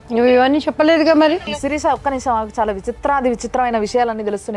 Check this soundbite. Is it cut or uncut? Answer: cut